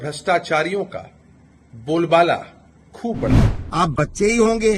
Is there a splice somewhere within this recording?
yes; 1 cut; at 3.5 s

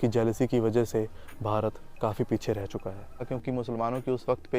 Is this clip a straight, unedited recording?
no; 1 cut; at 3.3 s

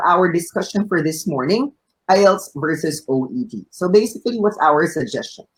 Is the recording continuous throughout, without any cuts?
yes; 0 cuts

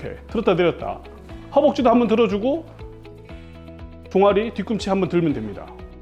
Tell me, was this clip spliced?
no; 0 cuts

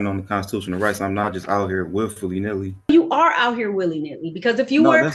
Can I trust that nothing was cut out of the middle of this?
no; 1 cut; at 2.9 s

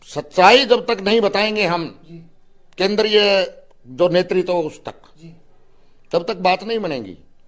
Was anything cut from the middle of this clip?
no; 0 cuts

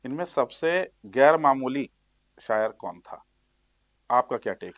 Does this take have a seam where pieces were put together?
no; 0 cuts

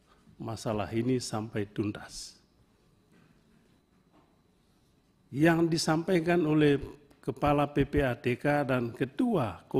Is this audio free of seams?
no; 1 cut; at 3.8 s

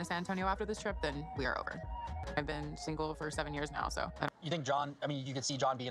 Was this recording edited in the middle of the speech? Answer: yes; 1 cut; at 4.6 s

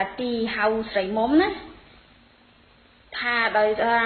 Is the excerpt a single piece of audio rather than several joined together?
no; 1 cut; at 2.3 s

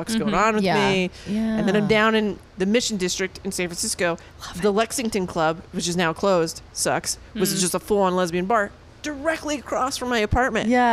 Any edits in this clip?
no; 0 cuts

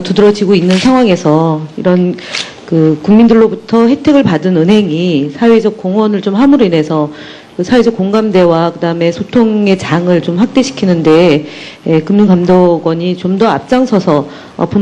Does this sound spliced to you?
yes; 1 cut; at 9.3 s

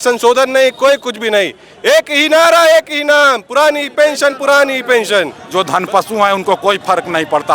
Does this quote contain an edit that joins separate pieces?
yes; 1 cut; at 5.4 s

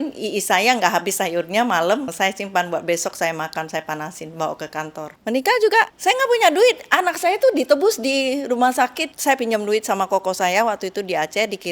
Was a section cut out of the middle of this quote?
yes; 4 cuts; at 2.1 s, 5.1 s, 5.9 s, 9.1 s

